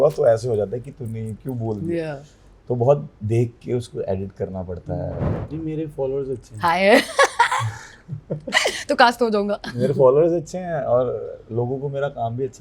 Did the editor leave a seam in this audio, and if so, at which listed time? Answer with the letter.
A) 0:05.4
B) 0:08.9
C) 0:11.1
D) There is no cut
A